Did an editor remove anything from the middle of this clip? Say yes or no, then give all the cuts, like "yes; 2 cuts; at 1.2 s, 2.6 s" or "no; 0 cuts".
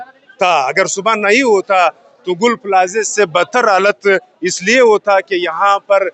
no; 0 cuts